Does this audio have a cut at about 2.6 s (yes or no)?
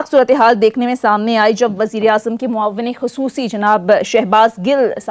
no